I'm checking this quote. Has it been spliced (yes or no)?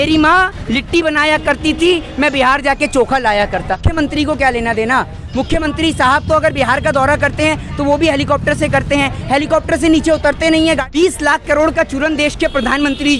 yes